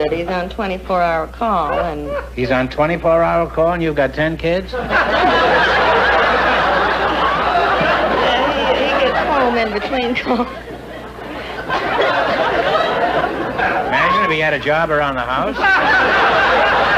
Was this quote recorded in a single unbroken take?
yes; 0 cuts

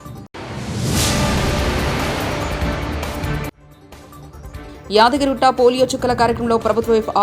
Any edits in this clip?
yes; 1 cut; at 4.7 s

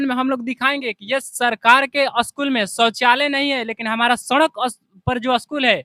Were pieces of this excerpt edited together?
no; 0 cuts

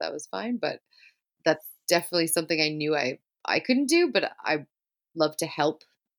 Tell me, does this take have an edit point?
no; 0 cuts

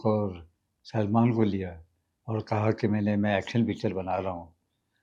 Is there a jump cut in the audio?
no; 0 cuts

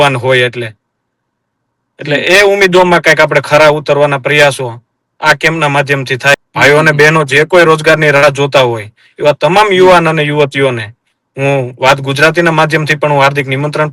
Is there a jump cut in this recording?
yes; 1 cut; at 6.3 s

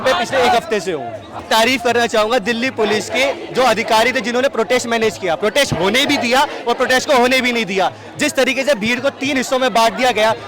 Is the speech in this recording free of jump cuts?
no; 1 cut; at 1.4 s

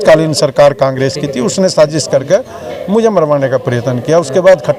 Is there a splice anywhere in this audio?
no; 0 cuts

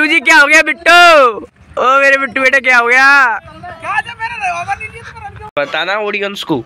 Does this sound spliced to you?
yes; 1 cut; at 5.5 s

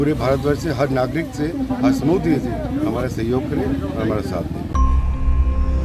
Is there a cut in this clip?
yes; 1 cut; at 4.7 s

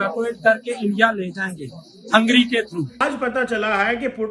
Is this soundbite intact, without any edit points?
no; 1 cut; at 3.1 s

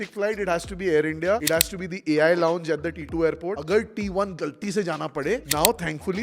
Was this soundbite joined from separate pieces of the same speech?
yes; 3 cuts; at 1.4 s, 3.2 s, 5.5 s

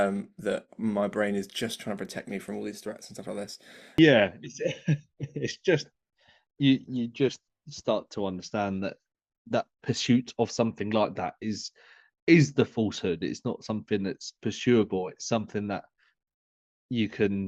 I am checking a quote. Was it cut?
yes; 1 cut; at 4.0 s

